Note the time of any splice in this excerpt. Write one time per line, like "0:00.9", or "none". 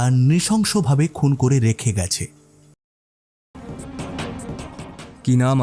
0:03.0